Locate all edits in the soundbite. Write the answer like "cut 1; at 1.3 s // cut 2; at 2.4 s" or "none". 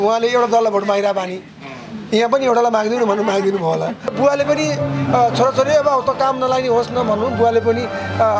cut 1; at 4.1 s

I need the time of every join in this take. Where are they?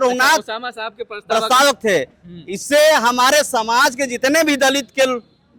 none

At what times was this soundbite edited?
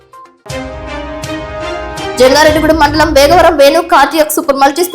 cut 1; at 2.1 s

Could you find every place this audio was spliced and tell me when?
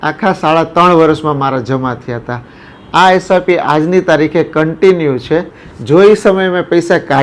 cut 1; at 5.6 s

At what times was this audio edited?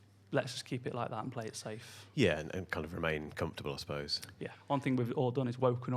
cut 1; at 4.5 s

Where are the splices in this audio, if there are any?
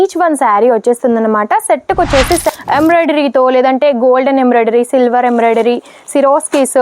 cut 1; at 2.4 s

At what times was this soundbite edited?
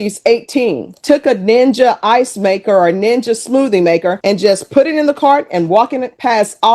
cut 1; at 1.0 s

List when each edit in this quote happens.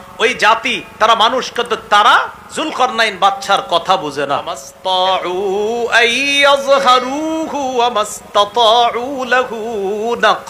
cut 1; at 4.7 s

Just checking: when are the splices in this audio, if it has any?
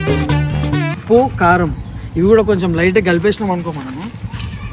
cut 1; at 1.0 s

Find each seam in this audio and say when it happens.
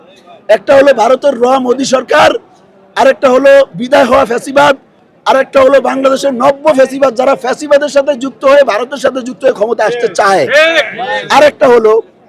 none

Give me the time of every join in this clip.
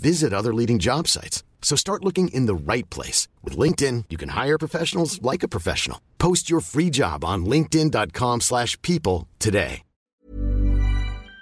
cut 1; at 10.1 s

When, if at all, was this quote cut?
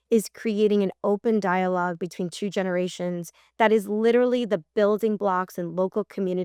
none

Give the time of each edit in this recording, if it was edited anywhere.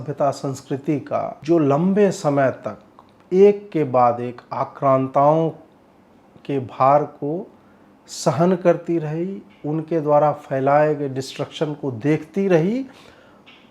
cut 1; at 1.4 s

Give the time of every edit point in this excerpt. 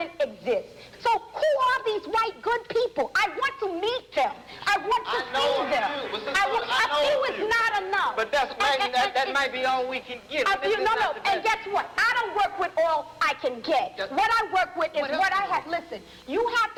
none

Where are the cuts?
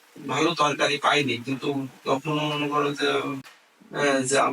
cut 1; at 3.4 s

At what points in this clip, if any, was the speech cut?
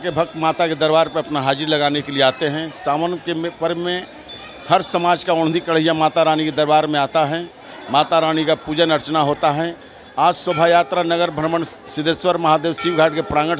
none

